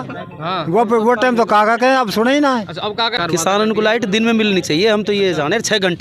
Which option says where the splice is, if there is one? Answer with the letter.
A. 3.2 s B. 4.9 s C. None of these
A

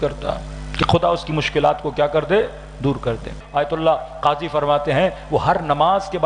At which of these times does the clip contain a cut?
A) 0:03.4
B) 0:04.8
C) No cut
A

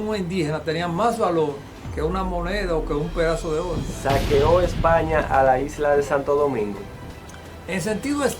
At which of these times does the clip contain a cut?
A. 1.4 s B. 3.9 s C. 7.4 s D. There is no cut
B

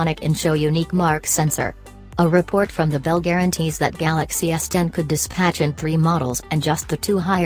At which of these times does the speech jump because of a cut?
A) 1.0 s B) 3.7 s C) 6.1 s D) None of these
A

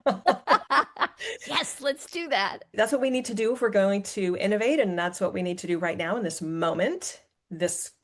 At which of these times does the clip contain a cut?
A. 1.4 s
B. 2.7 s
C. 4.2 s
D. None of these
B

